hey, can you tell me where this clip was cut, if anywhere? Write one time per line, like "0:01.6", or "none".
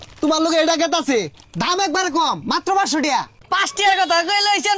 0:03.4